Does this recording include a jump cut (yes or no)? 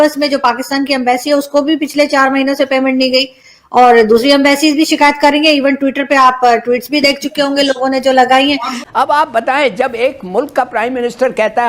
yes